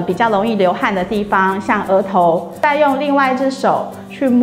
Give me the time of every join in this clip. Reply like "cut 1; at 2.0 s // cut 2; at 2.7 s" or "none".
cut 1; at 2.5 s

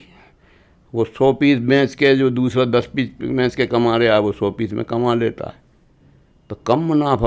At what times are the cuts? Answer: none

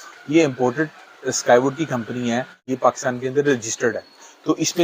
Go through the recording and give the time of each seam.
cut 1; at 2.6 s

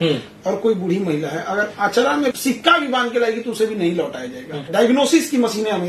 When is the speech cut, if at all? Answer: cut 1; at 2.3 s // cut 2; at 4.7 s

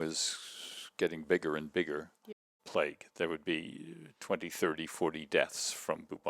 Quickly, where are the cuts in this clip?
cut 1; at 2.4 s

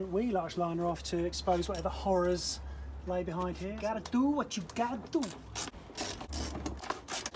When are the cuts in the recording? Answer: cut 1; at 3.8 s // cut 2; at 5.4 s

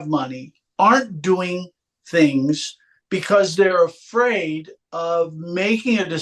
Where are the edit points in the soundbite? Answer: none

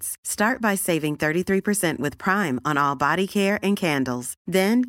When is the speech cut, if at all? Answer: none

